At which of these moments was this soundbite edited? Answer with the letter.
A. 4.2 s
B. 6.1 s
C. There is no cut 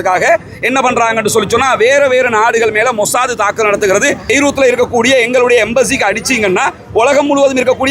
A